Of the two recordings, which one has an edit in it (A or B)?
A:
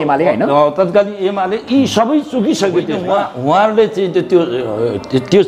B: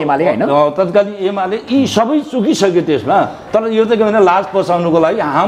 A